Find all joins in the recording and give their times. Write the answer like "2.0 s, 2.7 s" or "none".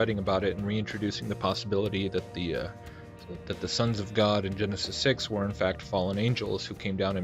2.2 s